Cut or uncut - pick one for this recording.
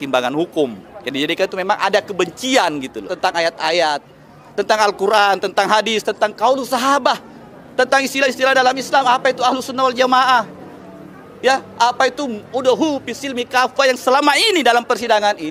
cut